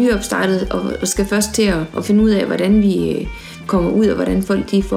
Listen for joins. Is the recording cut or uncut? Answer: cut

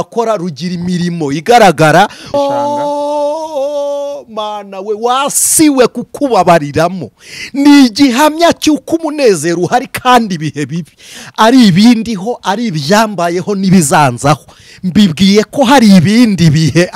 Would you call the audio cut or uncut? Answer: cut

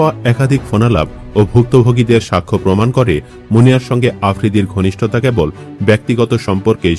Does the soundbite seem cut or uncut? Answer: uncut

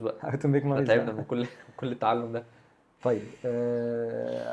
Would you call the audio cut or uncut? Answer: uncut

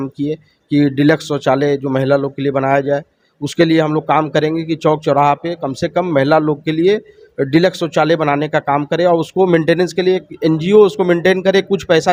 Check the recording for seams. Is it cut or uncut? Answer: uncut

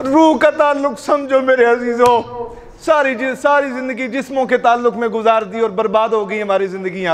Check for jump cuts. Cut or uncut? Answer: uncut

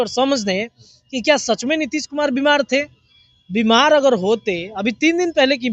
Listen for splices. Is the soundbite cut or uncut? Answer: uncut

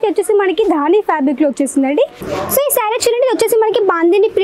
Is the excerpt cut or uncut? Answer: cut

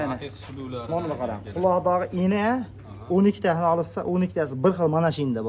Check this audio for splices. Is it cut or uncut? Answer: uncut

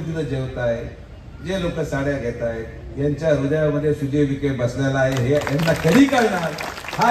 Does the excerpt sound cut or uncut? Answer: uncut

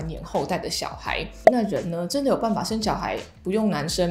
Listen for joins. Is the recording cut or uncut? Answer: cut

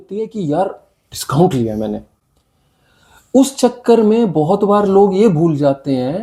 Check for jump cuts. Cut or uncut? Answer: uncut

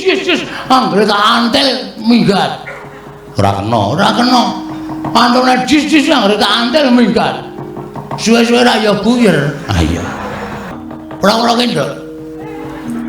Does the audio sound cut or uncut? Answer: cut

